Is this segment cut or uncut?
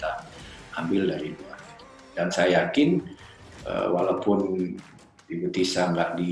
cut